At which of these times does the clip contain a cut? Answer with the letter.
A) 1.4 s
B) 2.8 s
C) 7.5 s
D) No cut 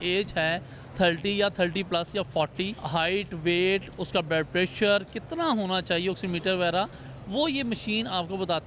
B